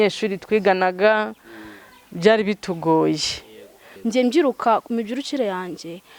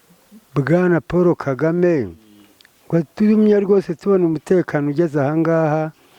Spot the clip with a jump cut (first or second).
first